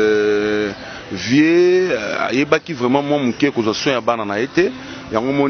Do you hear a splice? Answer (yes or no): no